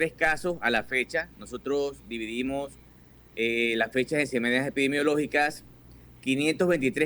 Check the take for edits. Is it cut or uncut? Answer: uncut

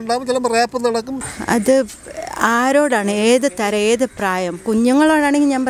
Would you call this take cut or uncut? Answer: cut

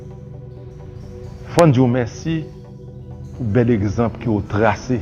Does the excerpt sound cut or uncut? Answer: cut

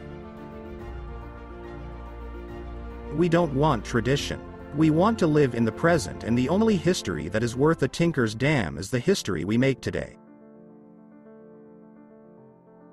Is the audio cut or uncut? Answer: uncut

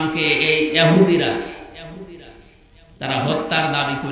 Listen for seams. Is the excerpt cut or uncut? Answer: uncut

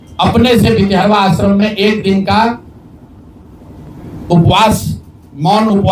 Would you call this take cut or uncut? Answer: uncut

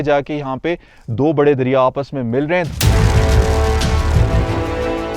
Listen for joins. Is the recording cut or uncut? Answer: cut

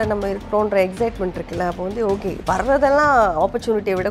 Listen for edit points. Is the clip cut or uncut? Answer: uncut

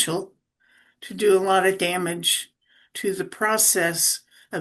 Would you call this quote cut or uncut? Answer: uncut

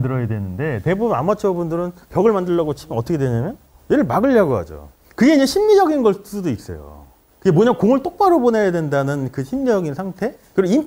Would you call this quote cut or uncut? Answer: uncut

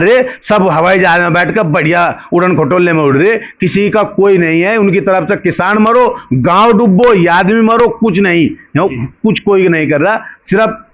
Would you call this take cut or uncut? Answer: uncut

